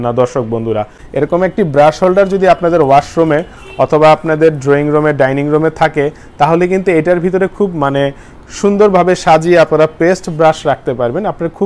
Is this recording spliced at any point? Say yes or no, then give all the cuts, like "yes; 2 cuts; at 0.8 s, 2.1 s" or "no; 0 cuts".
yes; 1 cut; at 1.0 s